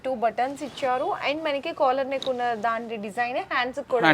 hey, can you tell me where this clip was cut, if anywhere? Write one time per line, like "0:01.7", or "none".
none